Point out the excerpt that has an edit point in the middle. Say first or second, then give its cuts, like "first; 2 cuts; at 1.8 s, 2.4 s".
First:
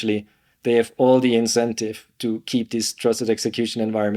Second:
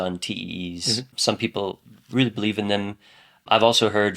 second; 2 cuts; at 1.1 s, 3.4 s